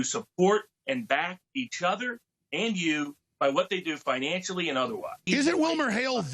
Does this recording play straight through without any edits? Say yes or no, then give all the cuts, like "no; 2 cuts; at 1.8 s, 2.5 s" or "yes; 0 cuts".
no; 1 cut; at 5.3 s